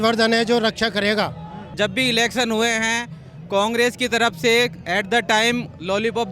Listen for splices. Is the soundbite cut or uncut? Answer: cut